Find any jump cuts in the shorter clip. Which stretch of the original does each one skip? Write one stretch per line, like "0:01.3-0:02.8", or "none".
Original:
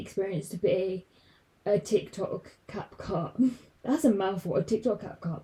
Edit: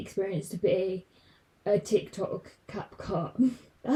none